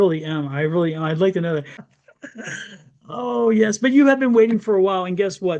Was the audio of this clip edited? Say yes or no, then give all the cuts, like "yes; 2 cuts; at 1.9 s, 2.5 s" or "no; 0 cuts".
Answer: yes; 1 cut; at 1.8 s